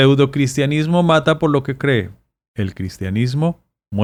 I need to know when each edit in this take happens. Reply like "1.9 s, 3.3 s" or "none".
none